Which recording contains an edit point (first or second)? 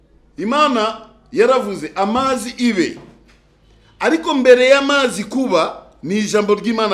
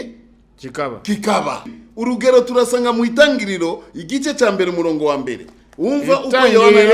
second